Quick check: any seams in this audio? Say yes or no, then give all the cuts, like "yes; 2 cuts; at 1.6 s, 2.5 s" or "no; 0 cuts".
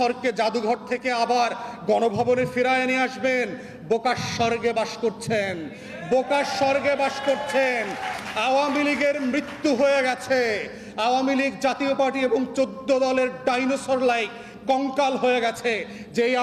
no; 0 cuts